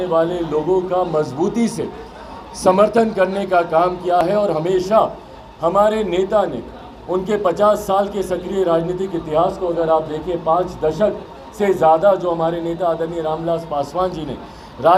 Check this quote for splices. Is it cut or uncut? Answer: uncut